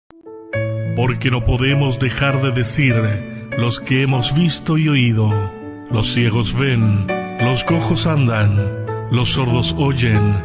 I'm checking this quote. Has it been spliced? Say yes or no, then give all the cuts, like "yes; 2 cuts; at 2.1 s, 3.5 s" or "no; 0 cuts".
yes; 1 cut; at 1.0 s